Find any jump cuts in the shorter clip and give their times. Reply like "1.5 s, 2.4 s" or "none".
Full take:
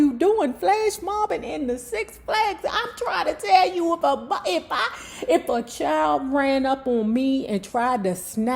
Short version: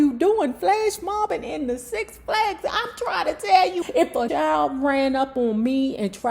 4.0 s